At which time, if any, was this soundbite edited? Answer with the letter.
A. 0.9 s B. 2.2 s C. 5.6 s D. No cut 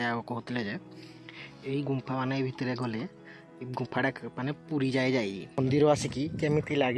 C